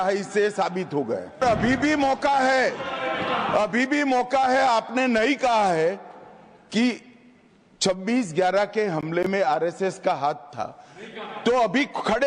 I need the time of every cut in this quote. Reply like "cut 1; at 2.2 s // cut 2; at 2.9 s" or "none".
cut 1; at 1.4 s

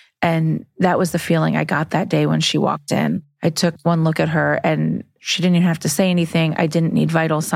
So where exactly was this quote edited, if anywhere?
cut 1; at 3.3 s

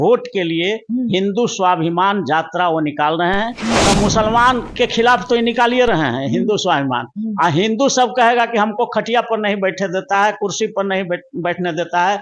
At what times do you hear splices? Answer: cut 1; at 3.8 s

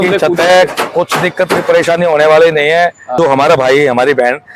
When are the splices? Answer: cut 1; at 3.1 s

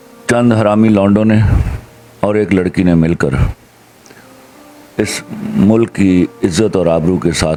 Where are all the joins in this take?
none

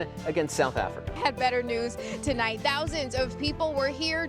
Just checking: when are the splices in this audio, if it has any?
cut 1; at 1.2 s

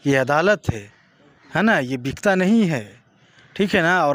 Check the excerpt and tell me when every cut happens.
none

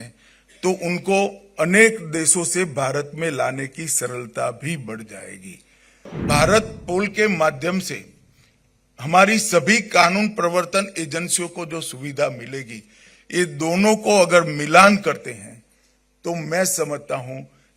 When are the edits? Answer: cut 1; at 6.1 s

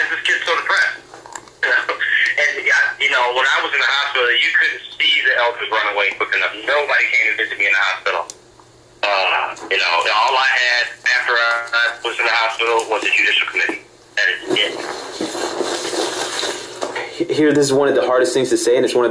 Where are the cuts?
none

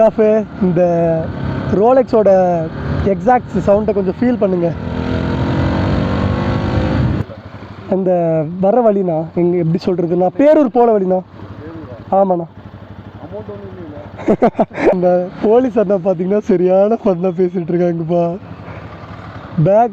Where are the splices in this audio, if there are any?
cut 1; at 7.2 s // cut 2; at 14.9 s

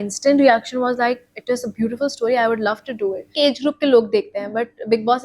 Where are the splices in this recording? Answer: cut 1; at 3.3 s

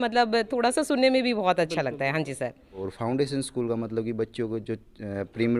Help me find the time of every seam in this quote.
cut 1; at 2.9 s

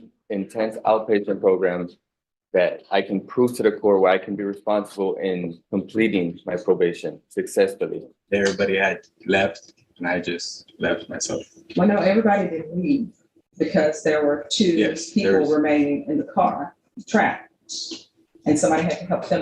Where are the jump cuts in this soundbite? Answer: cut 1; at 8.1 s

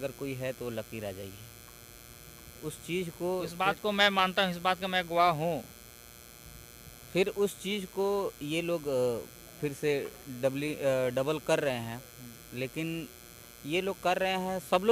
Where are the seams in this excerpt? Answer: none

